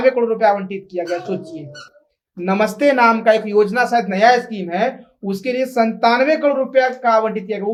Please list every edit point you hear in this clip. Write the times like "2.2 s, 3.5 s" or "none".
none